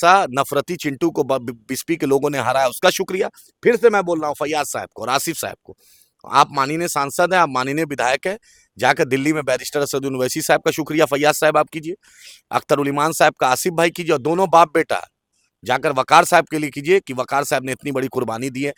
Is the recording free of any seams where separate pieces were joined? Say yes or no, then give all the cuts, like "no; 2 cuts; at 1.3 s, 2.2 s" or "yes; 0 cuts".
yes; 0 cuts